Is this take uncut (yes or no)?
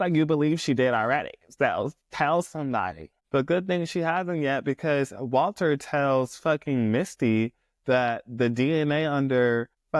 yes